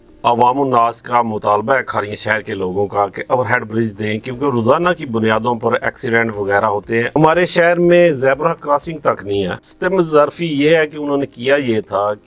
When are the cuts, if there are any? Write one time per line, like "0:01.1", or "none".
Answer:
0:07.2
0:09.6